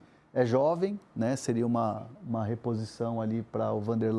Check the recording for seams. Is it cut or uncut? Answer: uncut